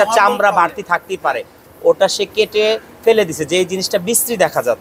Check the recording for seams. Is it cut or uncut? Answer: uncut